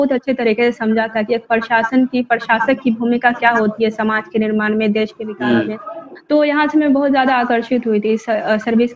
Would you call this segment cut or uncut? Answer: uncut